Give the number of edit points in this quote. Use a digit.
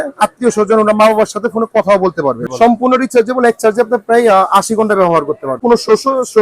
2